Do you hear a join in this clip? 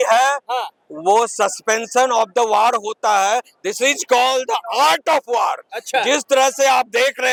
no; 0 cuts

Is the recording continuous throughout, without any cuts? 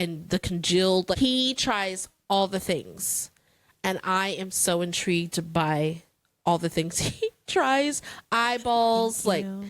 no; 1 cut; at 1.2 s

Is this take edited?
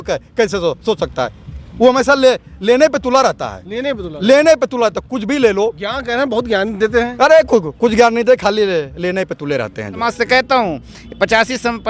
yes; 1 cut; at 10.1 s

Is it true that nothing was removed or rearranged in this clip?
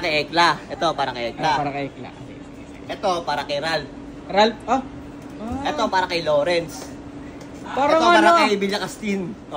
yes; 0 cuts

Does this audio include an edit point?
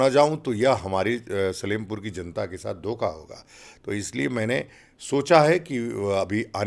no; 0 cuts

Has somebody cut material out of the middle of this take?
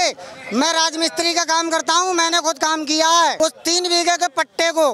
yes; 1 cut; at 3.4 s

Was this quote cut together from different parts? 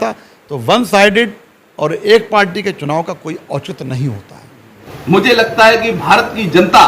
yes; 1 cut; at 4.8 s

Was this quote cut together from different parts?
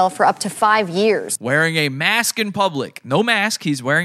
no; 0 cuts

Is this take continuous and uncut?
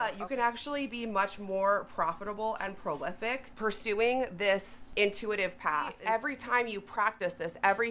no; 3 cuts; at 3.5 s, 4.8 s, 5.9 s

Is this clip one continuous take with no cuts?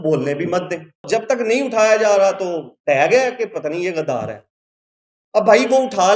no; 1 cut; at 1.0 s

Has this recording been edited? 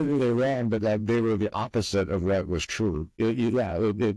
yes; 1 cut; at 3.1 s

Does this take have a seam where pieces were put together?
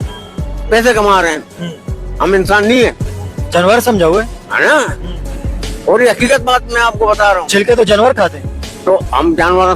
no; 0 cuts

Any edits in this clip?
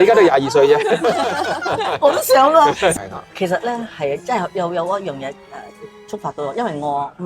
yes; 1 cut; at 2.9 s

